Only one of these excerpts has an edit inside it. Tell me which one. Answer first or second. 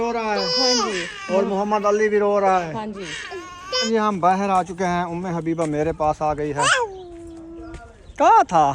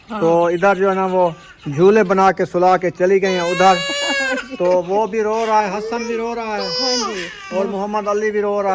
first